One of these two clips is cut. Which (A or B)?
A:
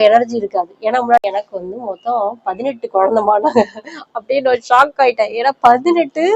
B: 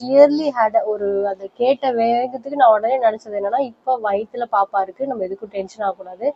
A